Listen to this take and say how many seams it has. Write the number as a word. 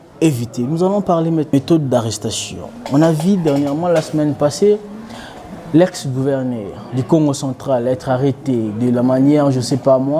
one